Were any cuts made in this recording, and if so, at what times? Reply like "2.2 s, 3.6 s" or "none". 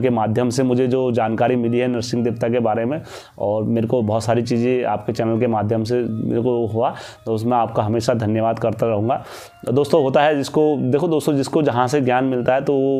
none